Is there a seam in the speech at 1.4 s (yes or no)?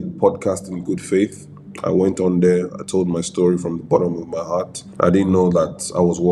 no